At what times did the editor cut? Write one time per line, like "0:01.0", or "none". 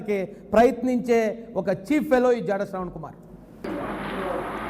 0:03.7